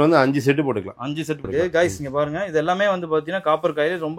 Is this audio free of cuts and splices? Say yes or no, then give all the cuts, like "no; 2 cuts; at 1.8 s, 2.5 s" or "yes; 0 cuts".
no; 1 cut; at 1.5 s